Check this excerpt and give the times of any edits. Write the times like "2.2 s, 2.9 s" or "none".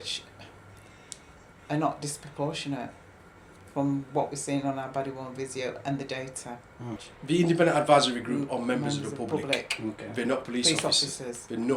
7.0 s

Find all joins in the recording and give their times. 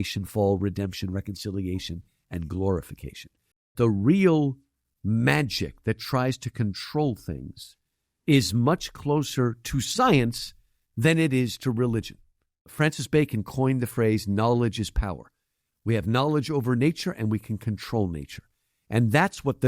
3.7 s, 12.6 s

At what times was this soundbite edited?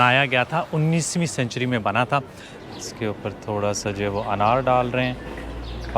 2.4 s

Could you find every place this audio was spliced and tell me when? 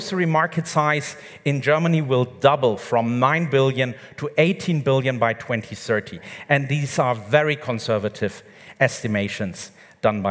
none

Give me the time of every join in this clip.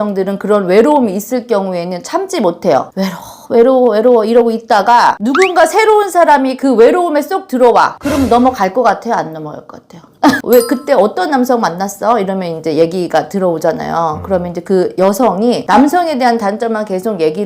10.4 s

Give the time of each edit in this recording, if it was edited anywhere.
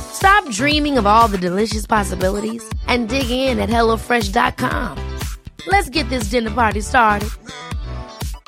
none

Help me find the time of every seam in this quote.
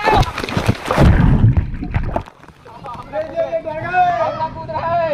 2.9 s

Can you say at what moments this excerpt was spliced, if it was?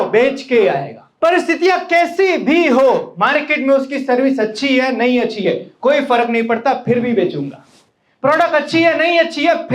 1.0 s

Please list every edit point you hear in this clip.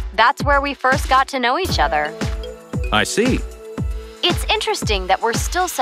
none

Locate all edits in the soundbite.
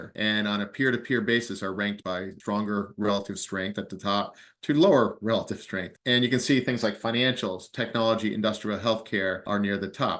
2.0 s

